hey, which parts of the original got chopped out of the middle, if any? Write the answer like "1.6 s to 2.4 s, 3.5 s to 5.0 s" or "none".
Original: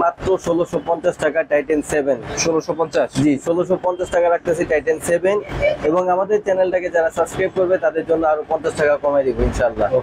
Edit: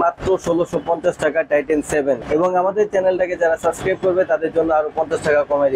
2.2 s to 5.8 s